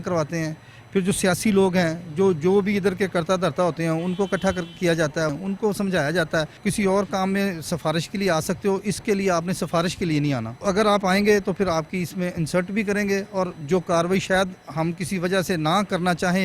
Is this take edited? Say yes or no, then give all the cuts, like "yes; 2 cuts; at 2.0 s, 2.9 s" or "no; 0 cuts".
yes; 4 cuts; at 5.4 s, 6.6 s, 10.6 s, 13.6 s